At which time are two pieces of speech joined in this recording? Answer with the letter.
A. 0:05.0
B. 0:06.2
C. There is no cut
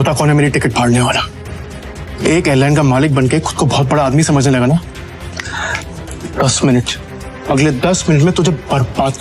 C